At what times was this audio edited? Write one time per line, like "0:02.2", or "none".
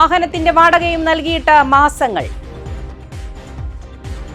none